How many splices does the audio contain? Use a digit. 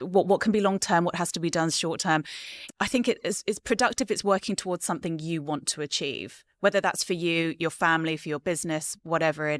1